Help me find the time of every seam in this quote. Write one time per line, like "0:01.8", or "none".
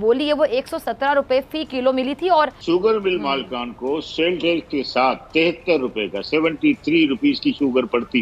0:02.6